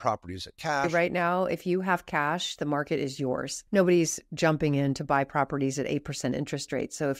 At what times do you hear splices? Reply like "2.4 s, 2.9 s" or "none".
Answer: 0.9 s, 3.5 s